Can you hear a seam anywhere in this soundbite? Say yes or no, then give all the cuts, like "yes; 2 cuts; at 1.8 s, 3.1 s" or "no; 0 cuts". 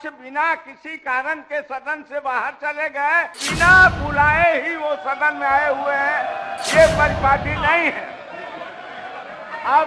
yes; 1 cut; at 3.4 s